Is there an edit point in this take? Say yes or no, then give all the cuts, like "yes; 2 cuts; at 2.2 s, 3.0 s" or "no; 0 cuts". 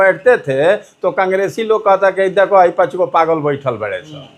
no; 0 cuts